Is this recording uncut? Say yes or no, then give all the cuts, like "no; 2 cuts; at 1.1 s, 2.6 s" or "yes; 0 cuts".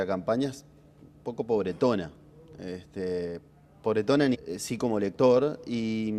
yes; 0 cuts